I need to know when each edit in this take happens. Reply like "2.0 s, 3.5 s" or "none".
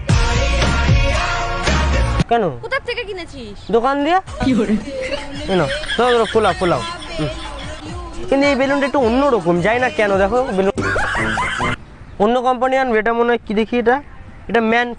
2.3 s, 7.7 s, 11.8 s